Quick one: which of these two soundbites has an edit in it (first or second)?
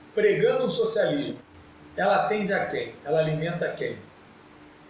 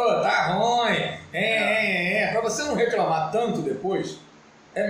first